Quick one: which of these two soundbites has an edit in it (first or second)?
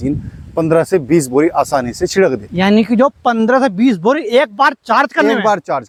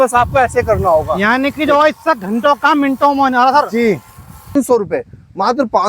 second